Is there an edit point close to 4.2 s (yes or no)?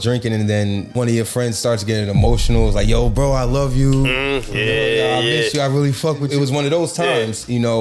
no